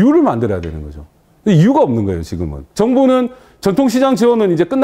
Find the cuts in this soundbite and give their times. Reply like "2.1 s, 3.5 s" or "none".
2.7 s